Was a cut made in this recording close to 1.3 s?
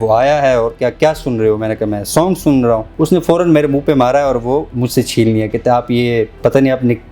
no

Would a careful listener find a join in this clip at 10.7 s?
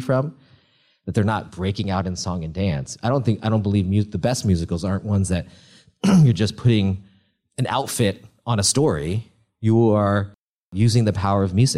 yes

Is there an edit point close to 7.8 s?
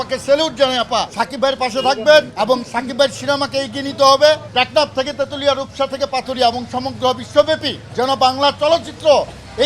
yes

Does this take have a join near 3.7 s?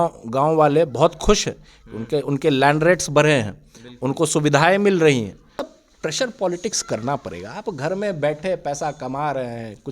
no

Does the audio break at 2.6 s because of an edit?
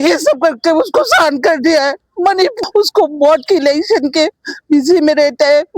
yes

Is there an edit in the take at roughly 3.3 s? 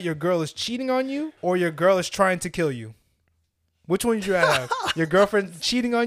no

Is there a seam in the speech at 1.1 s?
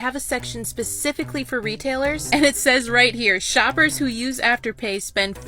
no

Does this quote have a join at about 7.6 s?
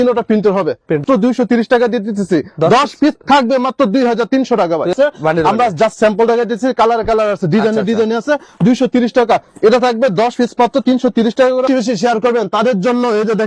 no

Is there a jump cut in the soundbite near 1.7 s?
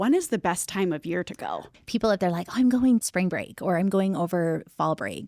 yes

